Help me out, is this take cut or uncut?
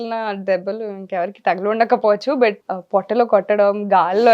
cut